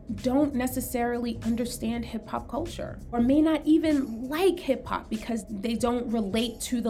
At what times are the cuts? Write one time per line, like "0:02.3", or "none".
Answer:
0:03.2
0:05.4